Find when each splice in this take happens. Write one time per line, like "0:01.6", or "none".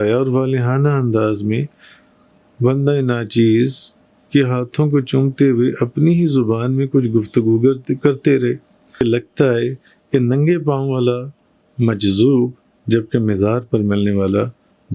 0:09.0